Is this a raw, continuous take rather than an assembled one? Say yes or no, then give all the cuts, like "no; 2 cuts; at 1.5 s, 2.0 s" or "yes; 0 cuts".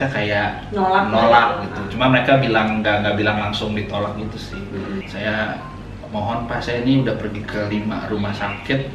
no; 1 cut; at 5.1 s